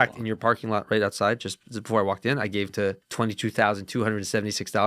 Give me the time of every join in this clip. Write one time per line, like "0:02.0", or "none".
0:03.0

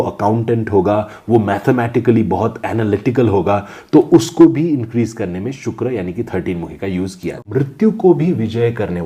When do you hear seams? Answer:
0:07.5

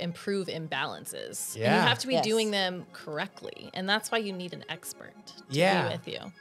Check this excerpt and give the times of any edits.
none

